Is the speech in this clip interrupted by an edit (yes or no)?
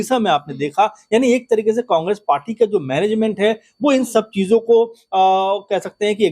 no